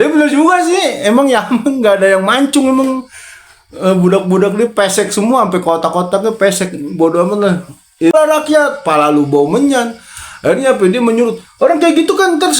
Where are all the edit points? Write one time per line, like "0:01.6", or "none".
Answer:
0:08.1